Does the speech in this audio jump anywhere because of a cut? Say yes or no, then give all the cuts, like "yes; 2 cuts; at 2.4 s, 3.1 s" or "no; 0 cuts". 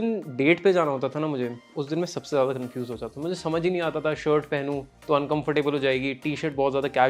no; 0 cuts